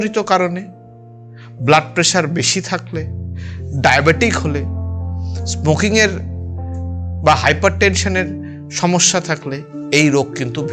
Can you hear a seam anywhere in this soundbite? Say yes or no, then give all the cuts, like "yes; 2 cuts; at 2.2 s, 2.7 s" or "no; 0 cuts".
no; 0 cuts